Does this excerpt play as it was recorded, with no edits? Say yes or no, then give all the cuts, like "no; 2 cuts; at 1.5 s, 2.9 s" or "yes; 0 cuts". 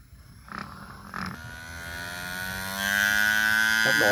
no; 1 cut; at 1.3 s